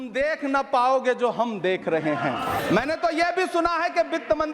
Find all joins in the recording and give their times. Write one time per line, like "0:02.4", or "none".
0:02.6